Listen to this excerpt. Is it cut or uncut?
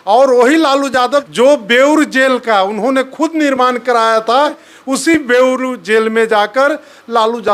cut